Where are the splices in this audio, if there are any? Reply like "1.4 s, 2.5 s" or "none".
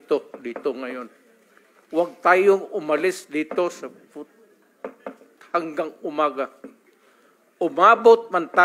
none